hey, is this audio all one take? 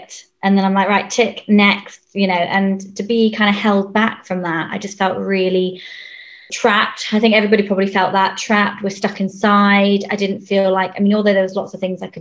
no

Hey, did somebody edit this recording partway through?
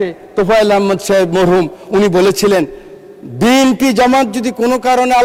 no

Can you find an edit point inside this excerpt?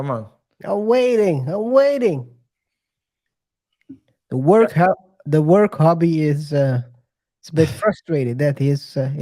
no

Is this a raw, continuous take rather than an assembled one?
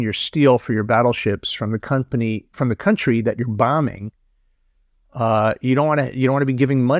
yes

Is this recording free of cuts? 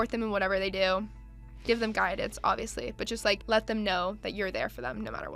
no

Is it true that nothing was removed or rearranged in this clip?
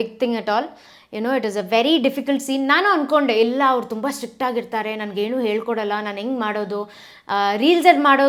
yes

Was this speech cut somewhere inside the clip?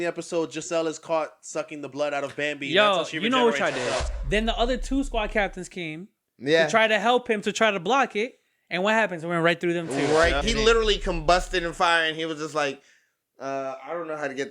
yes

